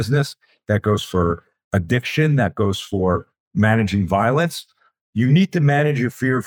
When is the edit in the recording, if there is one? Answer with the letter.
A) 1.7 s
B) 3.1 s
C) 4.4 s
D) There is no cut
D